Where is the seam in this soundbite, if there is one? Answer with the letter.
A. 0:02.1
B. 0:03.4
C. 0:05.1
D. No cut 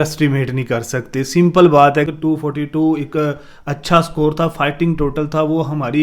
A